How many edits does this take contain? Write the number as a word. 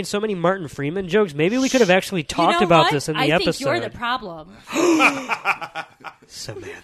zero